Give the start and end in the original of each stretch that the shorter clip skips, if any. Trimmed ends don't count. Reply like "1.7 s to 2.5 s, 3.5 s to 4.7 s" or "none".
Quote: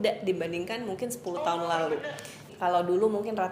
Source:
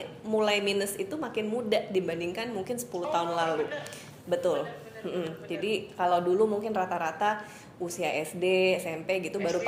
4.2 s to 5.9 s